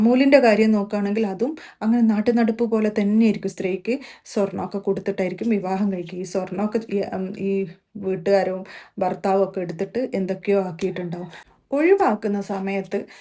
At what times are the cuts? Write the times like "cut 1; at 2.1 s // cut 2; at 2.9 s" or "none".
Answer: none